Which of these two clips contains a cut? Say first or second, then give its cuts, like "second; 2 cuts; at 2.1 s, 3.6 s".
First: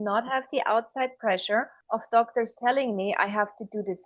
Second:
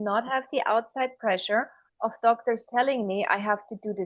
first; 1 cut; at 1.8 s